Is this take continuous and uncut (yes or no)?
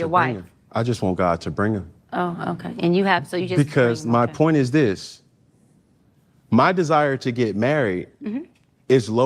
no